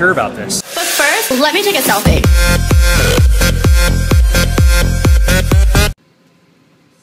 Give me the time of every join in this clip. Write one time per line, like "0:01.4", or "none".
0:05.2